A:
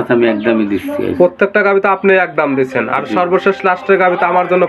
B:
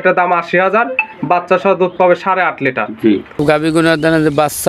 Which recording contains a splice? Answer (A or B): B